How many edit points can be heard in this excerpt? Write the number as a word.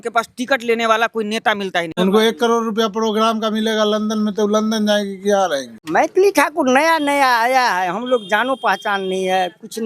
two